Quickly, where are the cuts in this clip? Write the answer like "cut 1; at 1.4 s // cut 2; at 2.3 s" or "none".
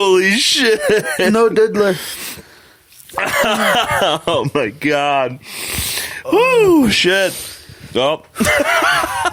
none